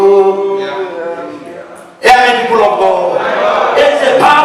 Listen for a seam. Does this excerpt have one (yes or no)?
yes